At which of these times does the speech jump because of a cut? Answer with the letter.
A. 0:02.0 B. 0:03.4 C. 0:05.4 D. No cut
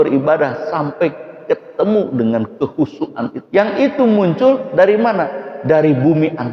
B